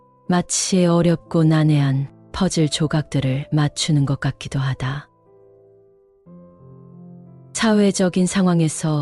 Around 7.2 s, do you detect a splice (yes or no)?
yes